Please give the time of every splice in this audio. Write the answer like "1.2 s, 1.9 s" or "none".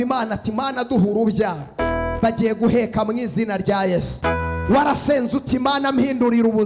none